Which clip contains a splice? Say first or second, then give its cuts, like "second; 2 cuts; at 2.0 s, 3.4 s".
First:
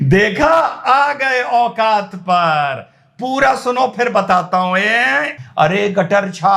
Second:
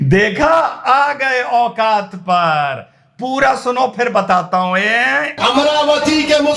first; 1 cut; at 5.3 s